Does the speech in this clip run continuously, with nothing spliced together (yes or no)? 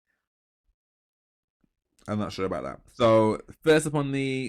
yes